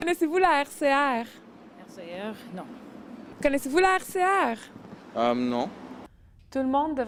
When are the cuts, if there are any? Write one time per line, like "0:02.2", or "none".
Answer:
none